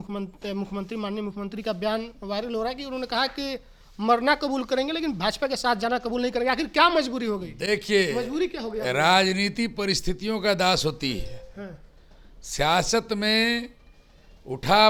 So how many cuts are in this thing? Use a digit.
0